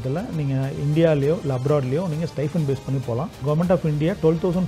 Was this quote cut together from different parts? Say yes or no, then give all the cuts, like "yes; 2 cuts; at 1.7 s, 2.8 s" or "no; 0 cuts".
yes; 1 cut; at 3.4 s